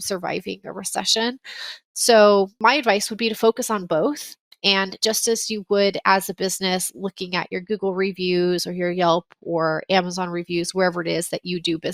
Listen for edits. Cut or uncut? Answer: uncut